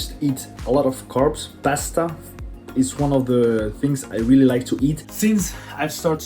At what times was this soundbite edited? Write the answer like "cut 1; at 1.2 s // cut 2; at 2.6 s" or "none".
cut 1; at 5.1 s